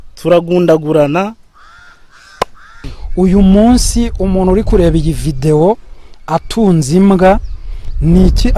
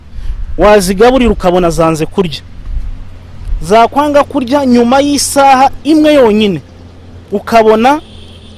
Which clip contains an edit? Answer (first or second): first